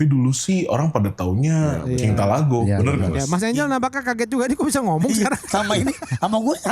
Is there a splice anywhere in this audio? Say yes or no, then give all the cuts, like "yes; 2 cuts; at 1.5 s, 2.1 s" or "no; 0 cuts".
yes; 1 cut; at 2.6 s